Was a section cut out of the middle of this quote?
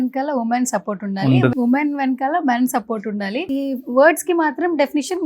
yes; 2 cuts; at 1.5 s, 3.4 s

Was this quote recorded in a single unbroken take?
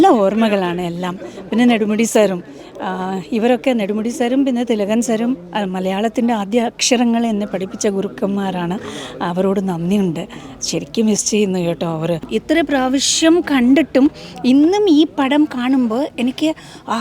no; 1 cut; at 12.3 s

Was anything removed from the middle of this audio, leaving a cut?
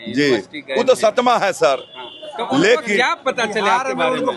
no; 0 cuts

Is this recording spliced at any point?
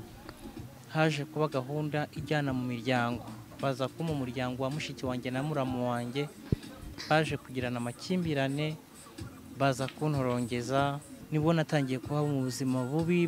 yes; 2 cuts; at 6.9 s, 11.1 s

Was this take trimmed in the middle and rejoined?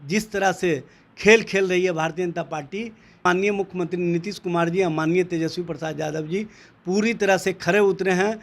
yes; 1 cut; at 3.2 s

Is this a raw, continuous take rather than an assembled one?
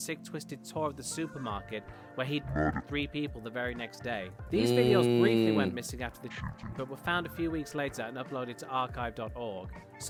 yes; 0 cuts

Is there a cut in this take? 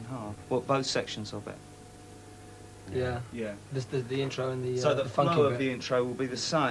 yes; 1 cut; at 2.1 s

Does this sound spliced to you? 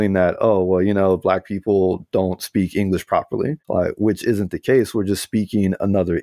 yes; 1 cut; at 3.6 s

